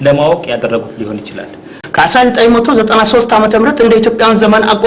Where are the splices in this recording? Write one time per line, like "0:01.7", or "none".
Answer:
0:01.8